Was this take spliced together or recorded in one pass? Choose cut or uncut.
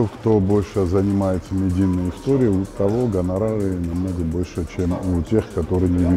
uncut